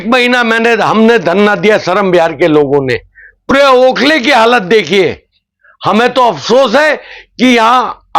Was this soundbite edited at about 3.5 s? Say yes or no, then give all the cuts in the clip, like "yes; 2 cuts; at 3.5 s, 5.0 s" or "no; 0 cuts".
yes; 1 cut; at 3.5 s